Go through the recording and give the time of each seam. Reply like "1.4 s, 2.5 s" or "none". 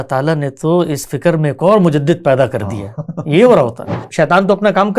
4.1 s